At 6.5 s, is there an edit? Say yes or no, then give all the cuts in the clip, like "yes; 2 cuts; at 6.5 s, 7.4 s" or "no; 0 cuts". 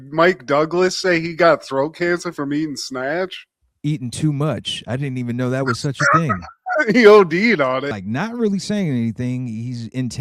no; 1 cut; at 7.9 s